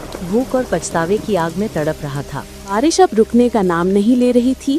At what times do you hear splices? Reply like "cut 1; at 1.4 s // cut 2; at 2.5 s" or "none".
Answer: cut 1; at 2.7 s